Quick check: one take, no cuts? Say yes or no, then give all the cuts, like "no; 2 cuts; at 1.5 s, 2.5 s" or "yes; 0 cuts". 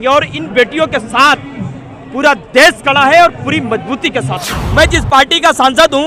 no; 1 cut; at 4.6 s